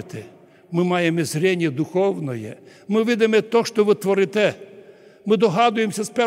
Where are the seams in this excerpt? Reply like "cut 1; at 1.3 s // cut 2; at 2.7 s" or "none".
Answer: none

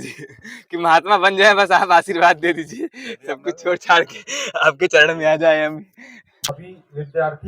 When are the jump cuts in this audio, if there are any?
cut 1; at 6.6 s

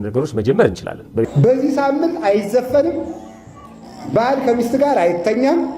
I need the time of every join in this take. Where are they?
cut 1; at 1.3 s

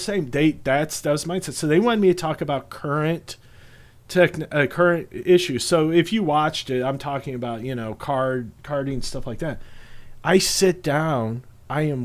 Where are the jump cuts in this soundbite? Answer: none

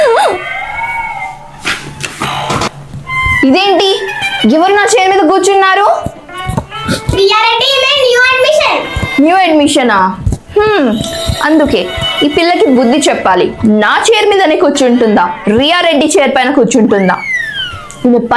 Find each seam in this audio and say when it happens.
none

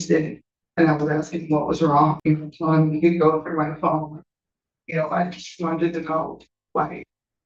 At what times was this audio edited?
cut 1; at 2.2 s

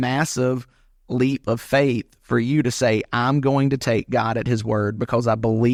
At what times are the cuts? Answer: none

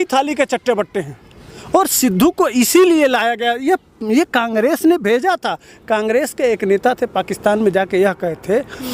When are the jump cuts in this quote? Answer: none

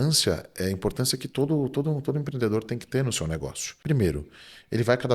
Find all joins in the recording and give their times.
cut 1; at 3.7 s

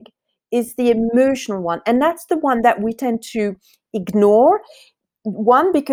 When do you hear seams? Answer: none

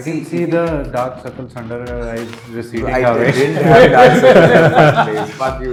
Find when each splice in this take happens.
none

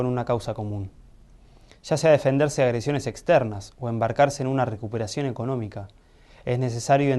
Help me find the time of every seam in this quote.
cut 1; at 3.3 s

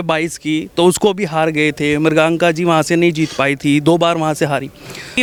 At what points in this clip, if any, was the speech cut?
none

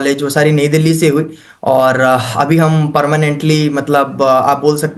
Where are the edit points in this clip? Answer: none

